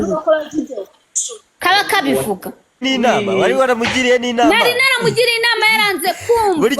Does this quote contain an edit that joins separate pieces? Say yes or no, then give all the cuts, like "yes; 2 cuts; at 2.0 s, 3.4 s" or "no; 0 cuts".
yes; 1 cut; at 2.8 s